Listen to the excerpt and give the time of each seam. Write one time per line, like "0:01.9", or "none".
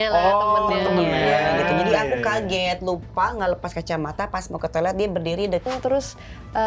0:05.6

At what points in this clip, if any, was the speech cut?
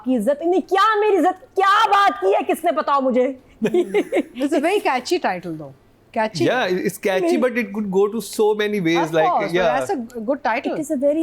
none

